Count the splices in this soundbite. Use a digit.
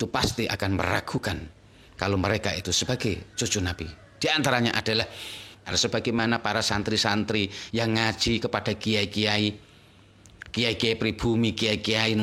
1